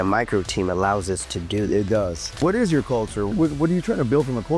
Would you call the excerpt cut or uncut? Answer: cut